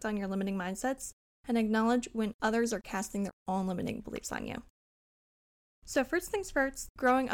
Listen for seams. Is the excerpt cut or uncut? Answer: uncut